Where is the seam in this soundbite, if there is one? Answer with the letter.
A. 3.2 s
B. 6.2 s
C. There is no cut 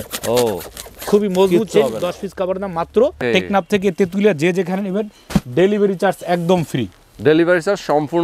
A